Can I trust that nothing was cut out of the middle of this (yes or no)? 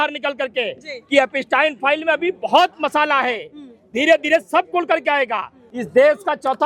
no